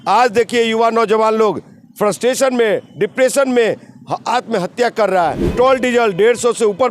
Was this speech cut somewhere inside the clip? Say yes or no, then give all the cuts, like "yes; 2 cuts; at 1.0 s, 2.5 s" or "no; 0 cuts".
yes; 1 cut; at 5.5 s